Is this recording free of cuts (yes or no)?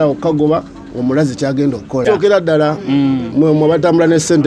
no